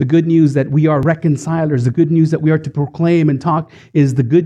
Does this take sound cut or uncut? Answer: cut